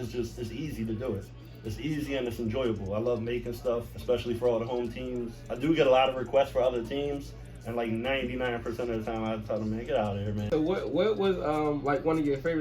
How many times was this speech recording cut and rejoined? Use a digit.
3